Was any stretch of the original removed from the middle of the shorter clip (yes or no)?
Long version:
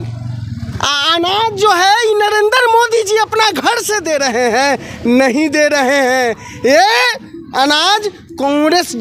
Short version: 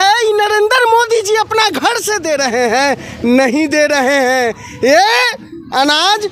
no